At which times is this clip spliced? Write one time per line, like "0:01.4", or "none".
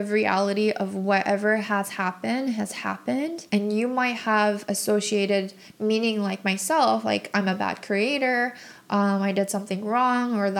none